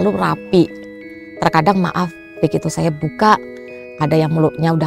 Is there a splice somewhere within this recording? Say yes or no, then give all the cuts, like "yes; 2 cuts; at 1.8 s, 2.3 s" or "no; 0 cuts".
no; 0 cuts